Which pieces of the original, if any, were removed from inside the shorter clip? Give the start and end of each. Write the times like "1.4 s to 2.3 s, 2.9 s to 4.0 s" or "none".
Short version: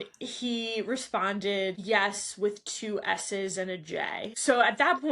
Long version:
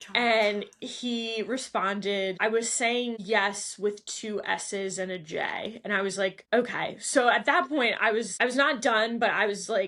2.4 s to 3.2 s, 5.7 s to 7.0 s